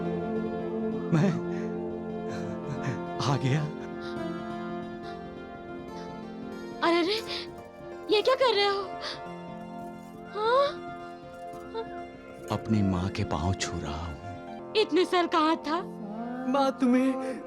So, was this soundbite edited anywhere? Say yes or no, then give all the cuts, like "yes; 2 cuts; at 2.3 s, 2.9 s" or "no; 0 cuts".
yes; 1 cut; at 14.6 s